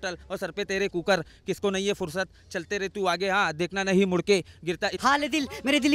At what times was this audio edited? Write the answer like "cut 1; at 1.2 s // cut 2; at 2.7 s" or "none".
cut 1; at 5.0 s